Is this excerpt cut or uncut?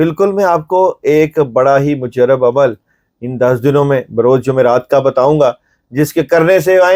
uncut